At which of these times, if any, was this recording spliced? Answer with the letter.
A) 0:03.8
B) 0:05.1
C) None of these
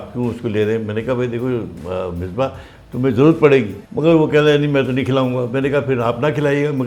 A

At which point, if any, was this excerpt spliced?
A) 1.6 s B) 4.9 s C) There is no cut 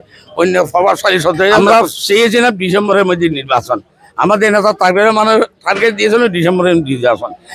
A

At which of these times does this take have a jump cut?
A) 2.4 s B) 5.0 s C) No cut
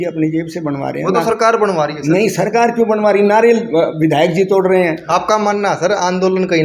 B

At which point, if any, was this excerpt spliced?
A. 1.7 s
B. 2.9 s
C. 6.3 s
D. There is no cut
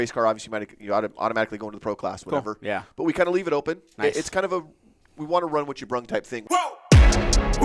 C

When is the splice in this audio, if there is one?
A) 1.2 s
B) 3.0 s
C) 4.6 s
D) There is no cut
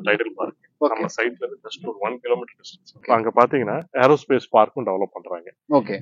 B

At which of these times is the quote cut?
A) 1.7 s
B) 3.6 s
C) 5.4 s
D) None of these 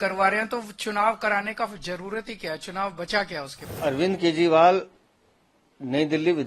B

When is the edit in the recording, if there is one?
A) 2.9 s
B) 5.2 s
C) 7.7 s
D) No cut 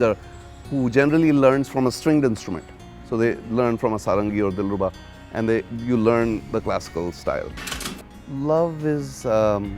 C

